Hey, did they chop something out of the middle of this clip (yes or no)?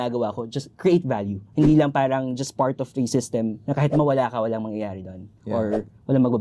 no